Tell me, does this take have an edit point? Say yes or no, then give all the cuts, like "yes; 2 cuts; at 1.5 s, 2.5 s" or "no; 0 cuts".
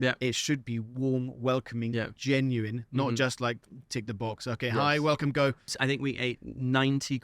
yes; 1 cut; at 5.8 s